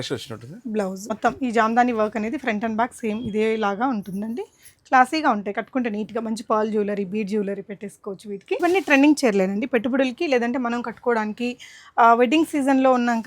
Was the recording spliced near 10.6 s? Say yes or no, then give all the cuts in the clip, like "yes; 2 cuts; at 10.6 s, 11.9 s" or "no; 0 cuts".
no; 2 cuts; at 1.1 s, 8.6 s